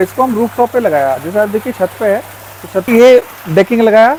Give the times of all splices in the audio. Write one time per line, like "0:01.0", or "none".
none

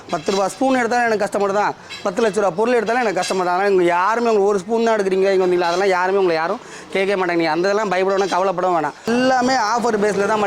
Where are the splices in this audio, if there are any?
0:09.1

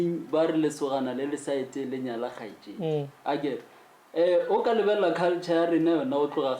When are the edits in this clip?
none

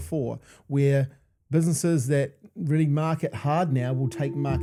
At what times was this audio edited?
none

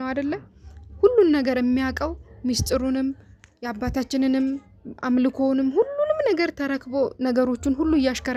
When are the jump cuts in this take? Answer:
none

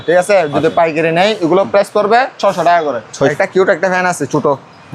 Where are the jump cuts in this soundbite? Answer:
0:03.3

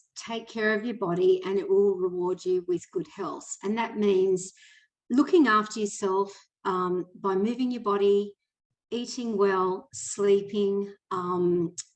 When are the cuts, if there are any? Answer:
none

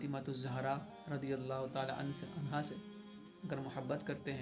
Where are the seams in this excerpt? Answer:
none

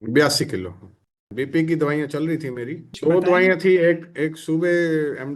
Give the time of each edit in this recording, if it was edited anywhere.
0:00.9
0:02.9

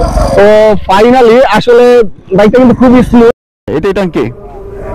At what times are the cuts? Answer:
0:03.5

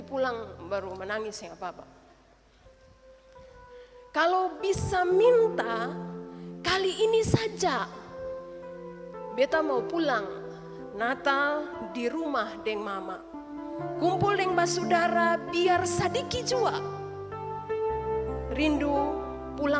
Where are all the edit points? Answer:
none

